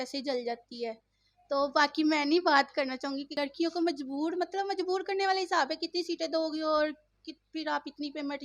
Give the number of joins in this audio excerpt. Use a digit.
1